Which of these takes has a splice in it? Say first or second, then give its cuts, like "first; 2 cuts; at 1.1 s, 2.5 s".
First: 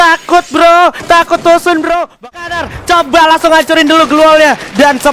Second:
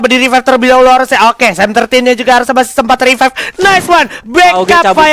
first; 1 cut; at 2.2 s